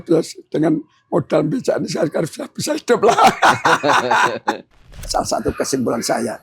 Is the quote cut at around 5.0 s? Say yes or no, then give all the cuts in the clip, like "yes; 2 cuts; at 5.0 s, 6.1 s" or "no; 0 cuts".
yes; 1 cut; at 5.0 s